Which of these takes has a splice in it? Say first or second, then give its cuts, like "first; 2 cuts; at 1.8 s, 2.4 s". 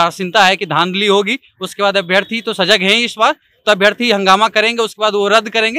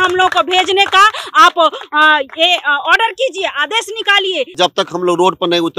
second; 1 cut; at 4.5 s